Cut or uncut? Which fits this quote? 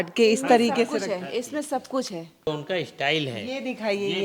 cut